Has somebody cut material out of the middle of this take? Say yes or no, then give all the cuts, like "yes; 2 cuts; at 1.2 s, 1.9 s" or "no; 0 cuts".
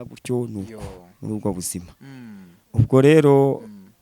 no; 0 cuts